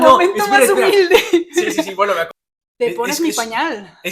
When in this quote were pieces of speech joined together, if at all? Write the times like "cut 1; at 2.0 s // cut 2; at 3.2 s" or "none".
cut 1; at 2.3 s